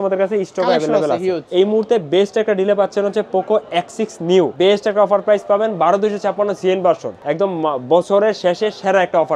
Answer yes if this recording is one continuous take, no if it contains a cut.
no